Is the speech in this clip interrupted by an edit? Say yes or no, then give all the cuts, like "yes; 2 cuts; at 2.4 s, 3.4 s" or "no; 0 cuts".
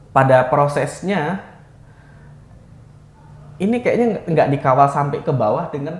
no; 0 cuts